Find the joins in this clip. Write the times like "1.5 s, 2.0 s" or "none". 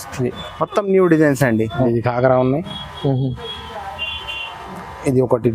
1.9 s